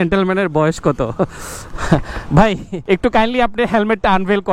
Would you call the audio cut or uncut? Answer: cut